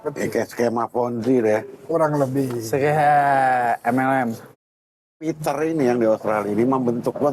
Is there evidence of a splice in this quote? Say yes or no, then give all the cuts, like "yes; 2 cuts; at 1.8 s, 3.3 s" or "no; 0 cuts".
yes; 1 cut; at 4.6 s